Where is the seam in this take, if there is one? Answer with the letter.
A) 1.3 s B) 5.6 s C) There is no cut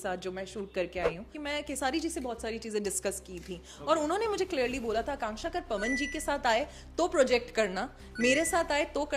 A